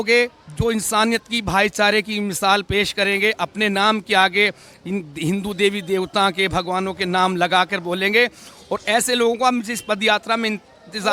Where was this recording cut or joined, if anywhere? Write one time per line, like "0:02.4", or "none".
none